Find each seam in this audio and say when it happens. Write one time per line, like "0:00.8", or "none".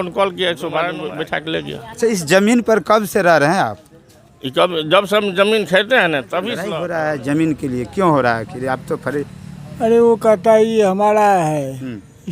0:01.0
0:06.6

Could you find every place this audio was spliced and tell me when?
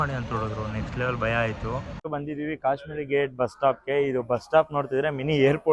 0:02.0

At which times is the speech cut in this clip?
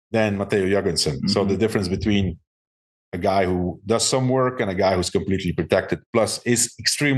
none

